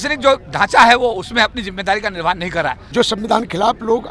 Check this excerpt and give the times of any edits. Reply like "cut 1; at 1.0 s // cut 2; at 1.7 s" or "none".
cut 1; at 2.8 s